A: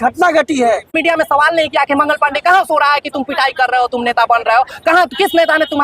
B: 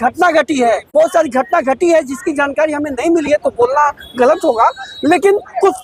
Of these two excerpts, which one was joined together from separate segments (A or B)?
A